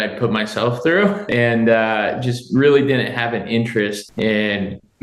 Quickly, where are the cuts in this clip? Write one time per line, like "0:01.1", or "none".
0:01.2
0:04.0